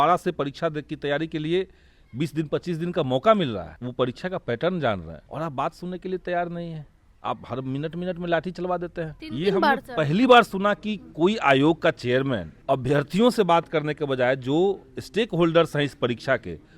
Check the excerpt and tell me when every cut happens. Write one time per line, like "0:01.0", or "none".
0:03.8
0:05.2
0:09.2
0:12.5